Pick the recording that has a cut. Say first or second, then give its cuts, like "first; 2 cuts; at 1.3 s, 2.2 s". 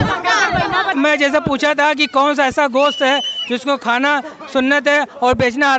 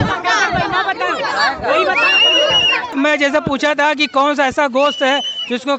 first; 1 cut; at 0.9 s